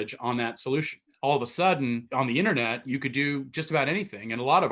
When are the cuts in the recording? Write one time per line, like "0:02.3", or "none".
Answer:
0:01.0
0:02.1